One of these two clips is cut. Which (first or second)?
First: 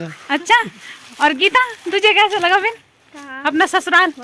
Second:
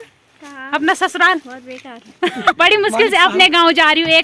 second